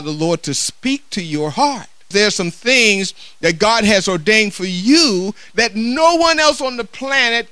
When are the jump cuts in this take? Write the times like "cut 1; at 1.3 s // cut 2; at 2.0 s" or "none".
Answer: cut 1; at 2.1 s // cut 2; at 5.5 s